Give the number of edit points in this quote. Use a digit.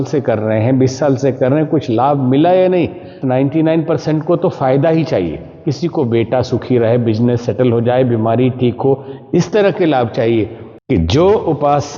2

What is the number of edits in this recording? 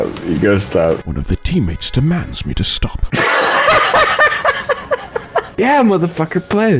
1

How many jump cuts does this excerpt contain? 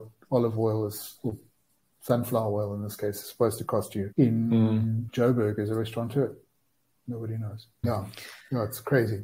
3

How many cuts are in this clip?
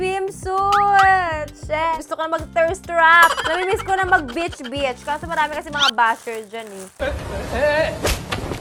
0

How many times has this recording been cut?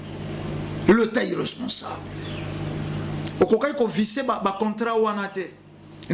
1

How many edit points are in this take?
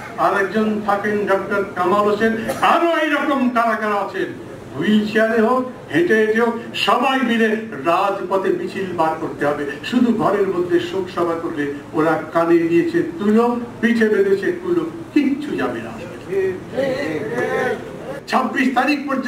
1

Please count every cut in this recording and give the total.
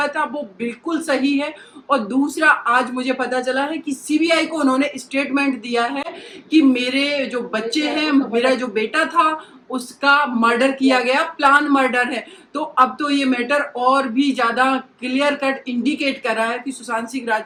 0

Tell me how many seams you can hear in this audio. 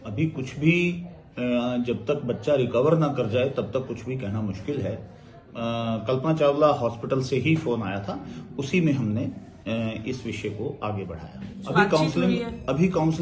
2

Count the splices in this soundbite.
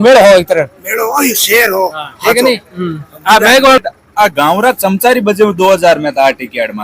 1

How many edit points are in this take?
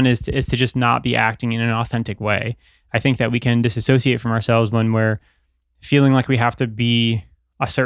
0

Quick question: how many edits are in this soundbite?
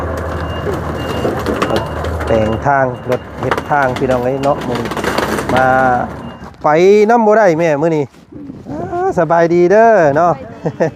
1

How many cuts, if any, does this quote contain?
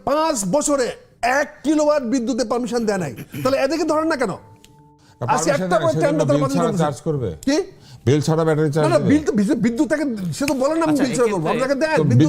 0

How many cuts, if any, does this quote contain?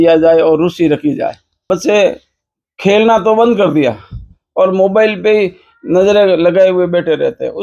1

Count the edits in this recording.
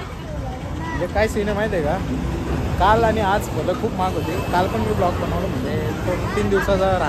0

